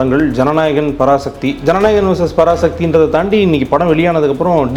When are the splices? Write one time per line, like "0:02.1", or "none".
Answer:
none